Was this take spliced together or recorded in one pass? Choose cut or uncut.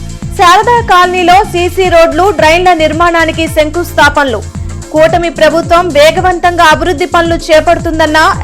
uncut